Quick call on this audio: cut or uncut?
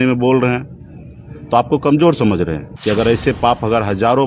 cut